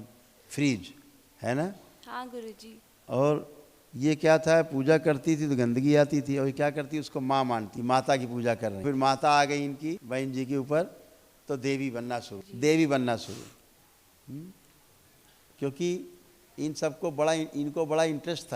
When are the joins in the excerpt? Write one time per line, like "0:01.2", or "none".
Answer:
0:07.7
0:08.8
0:10.0
0:12.4